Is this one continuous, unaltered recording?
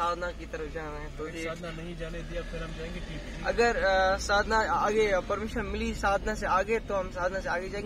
yes; 0 cuts

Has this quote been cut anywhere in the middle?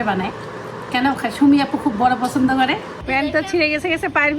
yes; 1 cut; at 2.9 s

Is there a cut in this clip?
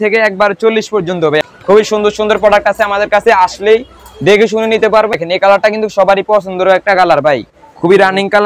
yes; 2 cuts; at 1.4 s, 5.2 s

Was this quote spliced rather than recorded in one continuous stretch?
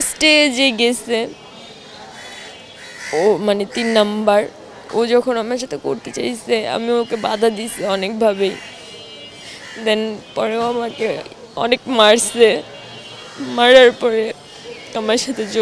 no; 0 cuts

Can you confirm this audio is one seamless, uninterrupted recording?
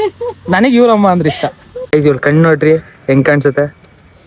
no; 1 cut; at 1.9 s

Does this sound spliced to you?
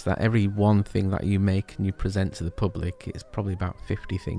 no; 0 cuts

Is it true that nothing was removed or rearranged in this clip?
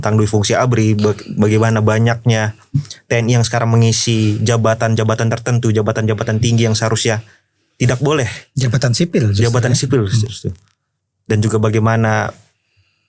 yes; 0 cuts

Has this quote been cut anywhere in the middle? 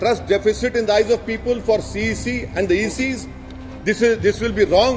no; 0 cuts

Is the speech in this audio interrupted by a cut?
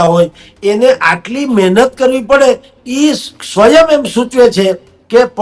no; 0 cuts

